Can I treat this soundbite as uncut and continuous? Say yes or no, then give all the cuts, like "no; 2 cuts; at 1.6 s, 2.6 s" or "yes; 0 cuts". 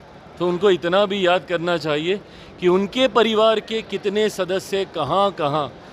yes; 0 cuts